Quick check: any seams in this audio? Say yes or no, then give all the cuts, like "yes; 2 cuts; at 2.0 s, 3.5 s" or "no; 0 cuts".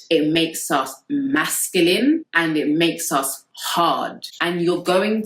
yes; 1 cut; at 4.3 s